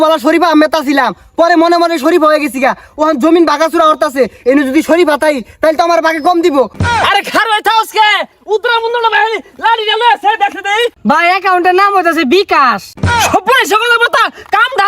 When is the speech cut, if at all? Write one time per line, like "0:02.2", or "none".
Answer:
0:06.7
0:11.0
0:13.2